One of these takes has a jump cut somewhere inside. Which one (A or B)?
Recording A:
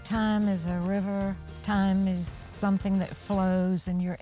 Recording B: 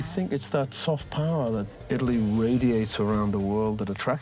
A